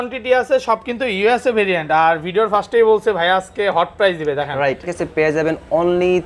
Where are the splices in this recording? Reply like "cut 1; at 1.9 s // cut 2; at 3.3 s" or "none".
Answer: cut 1; at 4.9 s